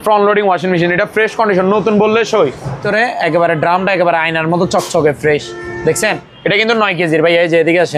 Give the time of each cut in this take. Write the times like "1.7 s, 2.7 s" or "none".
2.8 s